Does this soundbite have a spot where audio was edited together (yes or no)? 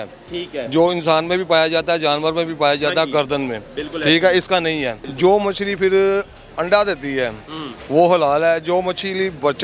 yes